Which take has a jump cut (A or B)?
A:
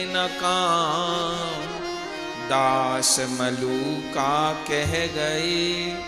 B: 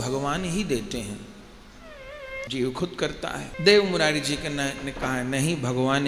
B